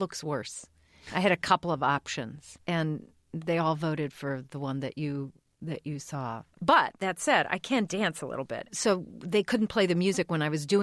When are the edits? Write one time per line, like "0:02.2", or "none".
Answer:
0:02.5
0:06.5
0:08.7